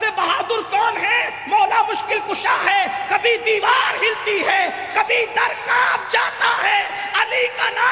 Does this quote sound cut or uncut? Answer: uncut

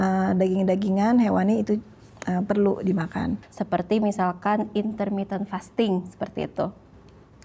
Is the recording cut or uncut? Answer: cut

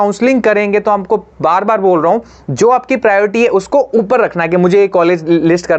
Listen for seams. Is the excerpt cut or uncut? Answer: uncut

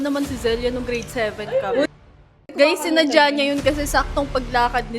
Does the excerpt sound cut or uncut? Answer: cut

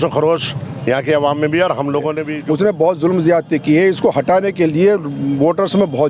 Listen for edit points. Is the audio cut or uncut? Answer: cut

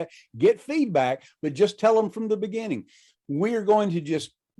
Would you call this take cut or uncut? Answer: uncut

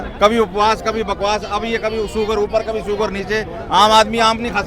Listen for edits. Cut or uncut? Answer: uncut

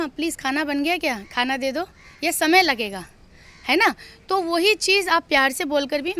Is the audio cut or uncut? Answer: uncut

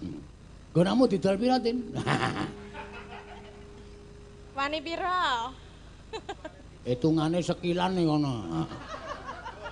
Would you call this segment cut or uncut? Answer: uncut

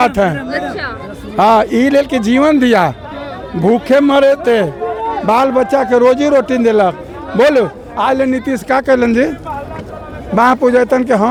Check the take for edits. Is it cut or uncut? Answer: uncut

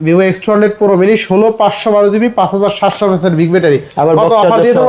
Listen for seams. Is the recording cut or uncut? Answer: uncut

